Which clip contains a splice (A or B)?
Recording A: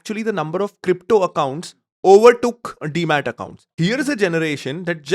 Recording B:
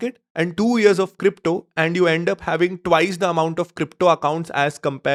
A